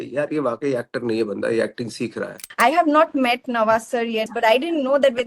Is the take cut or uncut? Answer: cut